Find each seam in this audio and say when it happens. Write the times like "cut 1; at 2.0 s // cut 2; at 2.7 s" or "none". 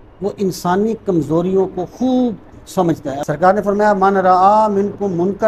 cut 1; at 3.2 s